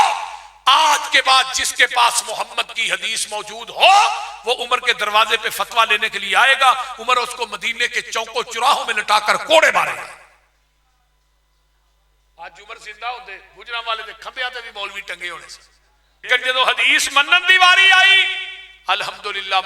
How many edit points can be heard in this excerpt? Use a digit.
1